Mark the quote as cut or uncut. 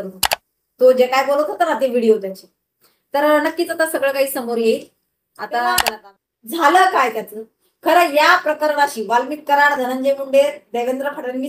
cut